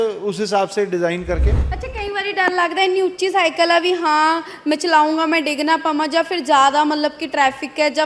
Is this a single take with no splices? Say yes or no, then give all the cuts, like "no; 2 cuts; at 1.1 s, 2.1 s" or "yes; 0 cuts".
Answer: yes; 0 cuts